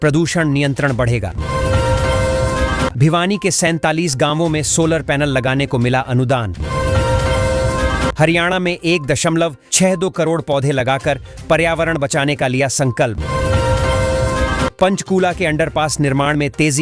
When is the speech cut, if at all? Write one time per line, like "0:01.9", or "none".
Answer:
none